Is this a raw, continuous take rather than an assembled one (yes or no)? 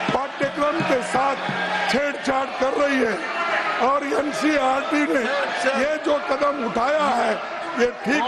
yes